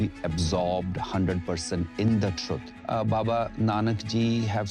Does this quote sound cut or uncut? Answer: cut